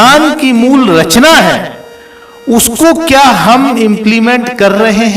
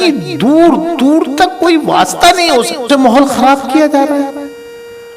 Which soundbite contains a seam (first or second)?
second